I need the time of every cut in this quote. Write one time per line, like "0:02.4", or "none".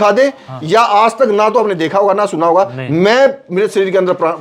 none

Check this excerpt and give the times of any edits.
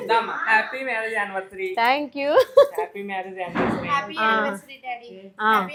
none

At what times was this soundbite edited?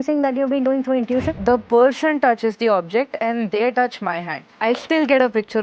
0:01.3
0:04.5

